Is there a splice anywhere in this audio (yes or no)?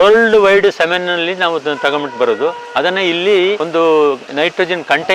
yes